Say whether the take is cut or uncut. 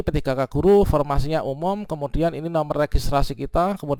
uncut